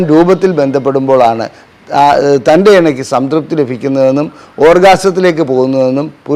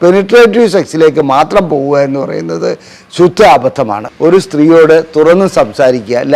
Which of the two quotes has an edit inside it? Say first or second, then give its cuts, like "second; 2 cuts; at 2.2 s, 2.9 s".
second; 1 cut; at 4.1 s